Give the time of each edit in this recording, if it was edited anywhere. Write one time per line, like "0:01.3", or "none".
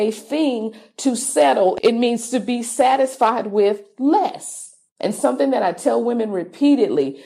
0:01.7
0:04.8